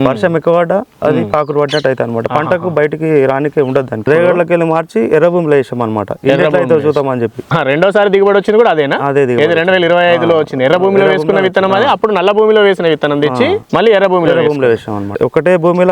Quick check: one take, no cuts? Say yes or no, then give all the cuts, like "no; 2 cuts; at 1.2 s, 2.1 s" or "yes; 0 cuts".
no; 3 cuts; at 4.1 s, 7.4 s, 15.2 s